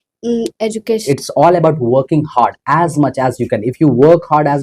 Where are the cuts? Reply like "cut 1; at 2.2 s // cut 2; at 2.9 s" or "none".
cut 1; at 1.0 s